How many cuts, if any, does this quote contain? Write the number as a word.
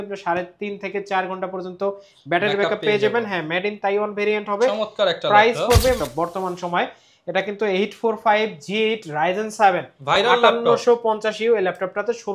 one